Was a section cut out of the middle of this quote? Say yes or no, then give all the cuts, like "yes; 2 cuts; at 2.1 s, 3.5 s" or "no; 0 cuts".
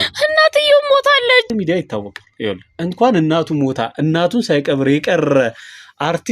yes; 1 cut; at 1.5 s